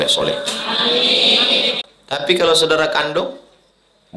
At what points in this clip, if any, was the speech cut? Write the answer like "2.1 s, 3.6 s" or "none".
1.9 s